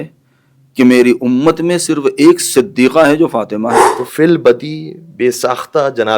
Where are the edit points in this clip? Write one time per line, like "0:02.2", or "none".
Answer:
0:03.8